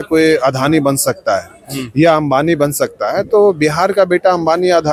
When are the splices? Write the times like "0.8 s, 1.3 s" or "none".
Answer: none